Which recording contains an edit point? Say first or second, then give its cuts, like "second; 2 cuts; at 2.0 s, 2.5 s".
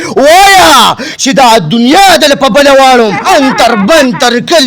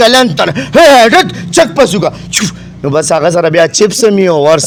first; 1 cut; at 3.2 s